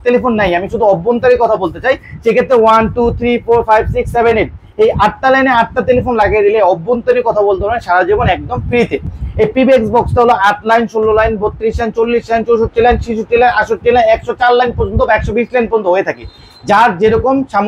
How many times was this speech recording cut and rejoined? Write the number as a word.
zero